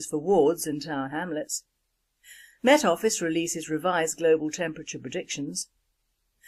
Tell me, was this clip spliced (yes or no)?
no